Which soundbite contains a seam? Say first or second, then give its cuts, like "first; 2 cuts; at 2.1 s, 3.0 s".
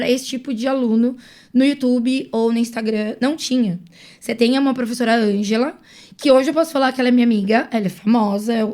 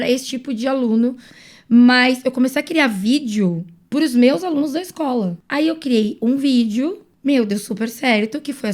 second; 3 cuts; at 1.3 s, 5.4 s, 7.1 s